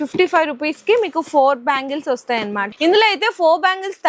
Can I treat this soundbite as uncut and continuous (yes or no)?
no